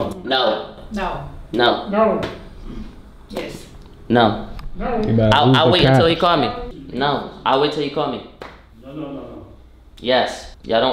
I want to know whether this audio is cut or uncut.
uncut